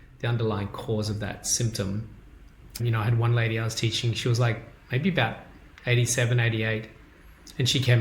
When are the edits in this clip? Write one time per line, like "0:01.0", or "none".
0:02.8